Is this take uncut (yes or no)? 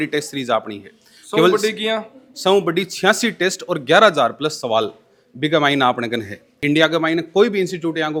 yes